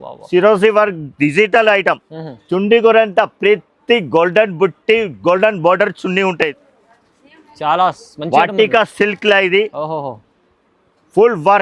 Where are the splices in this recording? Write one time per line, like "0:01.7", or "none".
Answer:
0:06.6